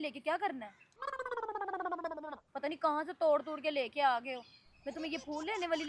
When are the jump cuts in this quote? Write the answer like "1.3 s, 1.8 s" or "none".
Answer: none